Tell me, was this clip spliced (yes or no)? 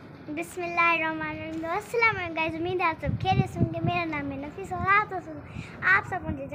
no